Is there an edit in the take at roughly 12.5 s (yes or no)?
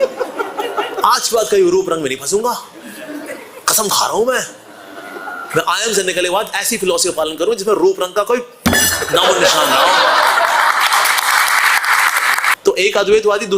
yes